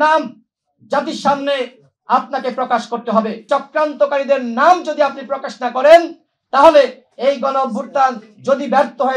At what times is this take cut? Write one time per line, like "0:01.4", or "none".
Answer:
0:03.4